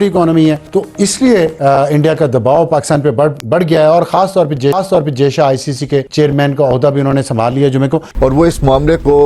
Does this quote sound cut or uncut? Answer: uncut